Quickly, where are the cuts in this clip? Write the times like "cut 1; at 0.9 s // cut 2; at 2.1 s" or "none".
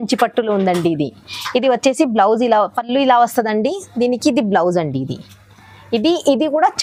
none